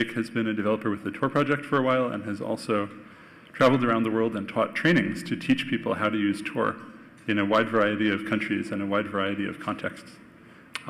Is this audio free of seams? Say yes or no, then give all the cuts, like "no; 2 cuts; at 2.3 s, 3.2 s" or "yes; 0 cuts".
no; 1 cut; at 7.4 s